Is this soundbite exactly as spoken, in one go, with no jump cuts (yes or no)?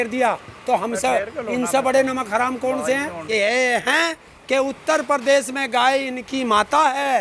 no